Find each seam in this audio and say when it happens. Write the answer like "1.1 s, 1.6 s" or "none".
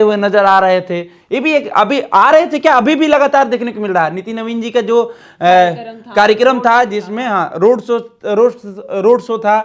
none